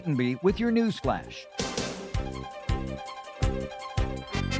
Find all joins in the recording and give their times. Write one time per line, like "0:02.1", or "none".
0:01.4